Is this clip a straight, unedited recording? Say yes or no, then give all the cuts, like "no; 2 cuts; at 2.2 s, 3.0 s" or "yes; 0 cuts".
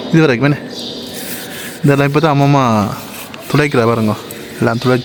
yes; 0 cuts